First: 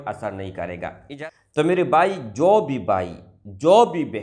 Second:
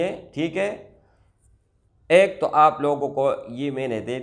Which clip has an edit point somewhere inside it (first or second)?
first